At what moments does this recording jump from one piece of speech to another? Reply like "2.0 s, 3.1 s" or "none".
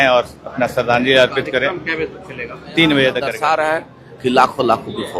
3.3 s